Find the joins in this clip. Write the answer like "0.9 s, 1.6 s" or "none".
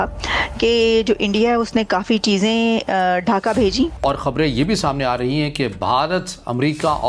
4.0 s